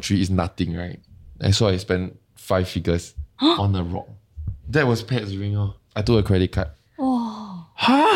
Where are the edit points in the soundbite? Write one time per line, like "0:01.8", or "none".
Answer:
0:03.2
0:04.6